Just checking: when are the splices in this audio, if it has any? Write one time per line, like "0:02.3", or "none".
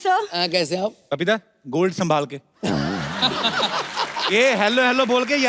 0:01.0